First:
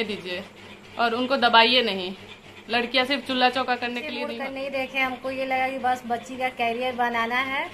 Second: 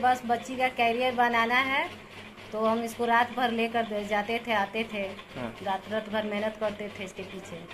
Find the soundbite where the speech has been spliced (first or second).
first